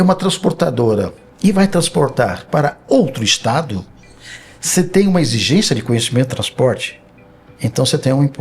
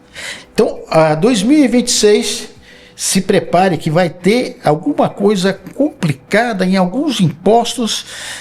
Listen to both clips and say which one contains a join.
first; 1 cut; at 1.2 s

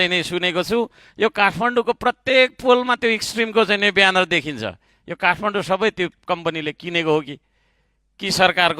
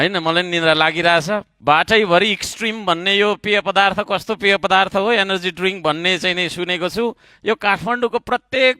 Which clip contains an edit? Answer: second; 1 cut; at 1.5 s

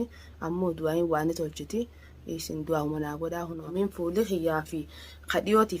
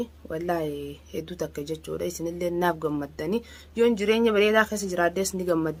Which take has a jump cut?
first; 1 cut; at 3.7 s

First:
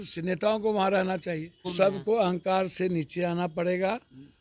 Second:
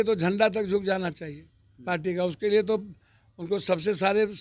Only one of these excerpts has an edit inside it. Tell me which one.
first; 1 cut; at 1.7 s

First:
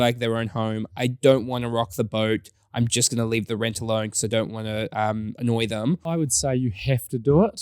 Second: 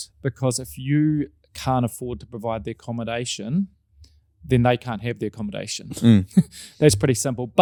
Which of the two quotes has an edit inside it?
first; 1 cut; at 6.1 s

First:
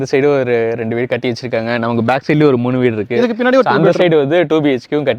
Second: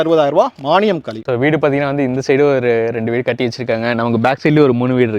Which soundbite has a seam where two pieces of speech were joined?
second; 1 cut; at 1.1 s

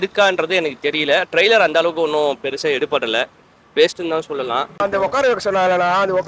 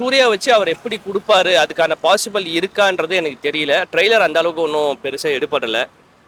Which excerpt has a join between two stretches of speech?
first; 1 cut; at 4.8 s

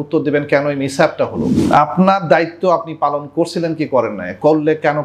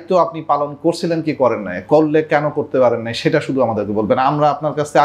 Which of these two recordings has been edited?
first; 1 cut; at 1.5 s

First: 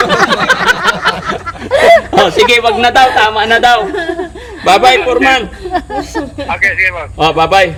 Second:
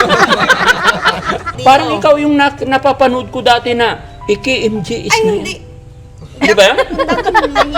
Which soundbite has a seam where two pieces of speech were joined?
second; 1 cut; at 1.5 s

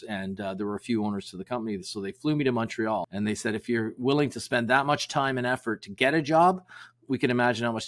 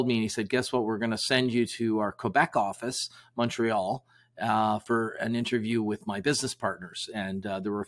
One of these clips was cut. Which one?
first; 1 cut; at 3.1 s

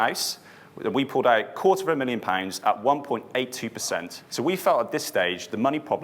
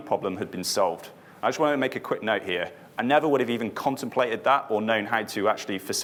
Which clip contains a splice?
first; 1 cut; at 4.2 s

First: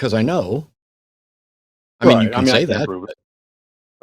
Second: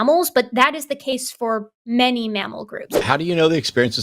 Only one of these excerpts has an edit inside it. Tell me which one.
second; 1 cut; at 2.9 s

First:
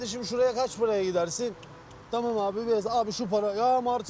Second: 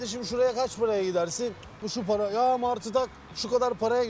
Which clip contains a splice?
second; 1 cut; at 1.9 s

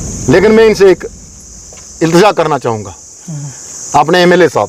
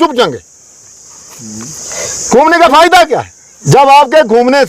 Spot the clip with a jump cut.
second; 1 cut; at 3.5 s

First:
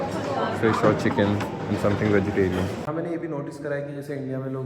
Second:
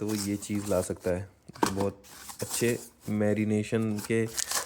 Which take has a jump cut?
first; 1 cut; at 2.9 s

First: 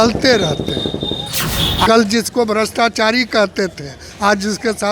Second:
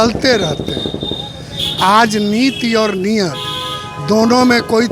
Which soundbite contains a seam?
first; 1 cut; at 1.9 s

